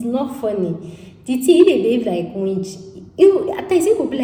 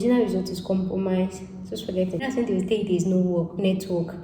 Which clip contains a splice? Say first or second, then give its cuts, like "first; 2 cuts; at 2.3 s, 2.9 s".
second; 1 cut; at 2.2 s